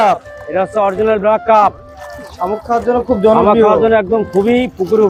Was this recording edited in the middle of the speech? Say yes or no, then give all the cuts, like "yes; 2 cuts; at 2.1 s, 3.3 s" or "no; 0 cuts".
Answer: no; 0 cuts